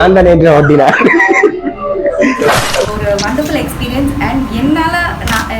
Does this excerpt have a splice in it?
yes; 1 cut; at 2.7 s

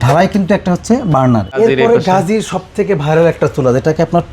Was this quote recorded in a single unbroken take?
no; 1 cut; at 1.5 s

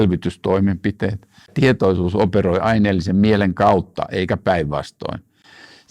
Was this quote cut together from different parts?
yes; 1 cut; at 1.5 s

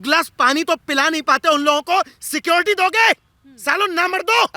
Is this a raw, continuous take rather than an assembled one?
yes; 0 cuts

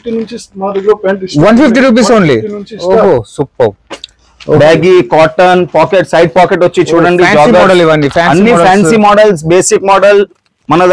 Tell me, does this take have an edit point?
no; 0 cuts

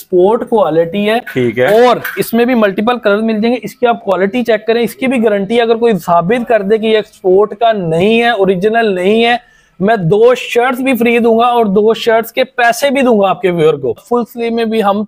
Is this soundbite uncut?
yes; 0 cuts

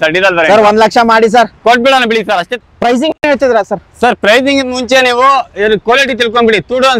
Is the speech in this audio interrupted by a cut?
yes; 1 cut; at 2.5 s

